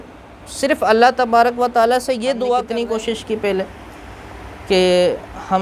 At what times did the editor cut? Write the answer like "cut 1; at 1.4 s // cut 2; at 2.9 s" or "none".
cut 1; at 2.8 s